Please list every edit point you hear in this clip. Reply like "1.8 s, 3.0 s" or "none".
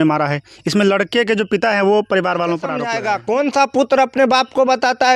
2.9 s